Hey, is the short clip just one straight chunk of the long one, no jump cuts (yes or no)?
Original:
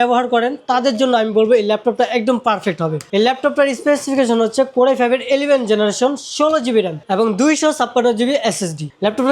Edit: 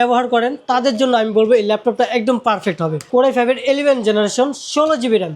no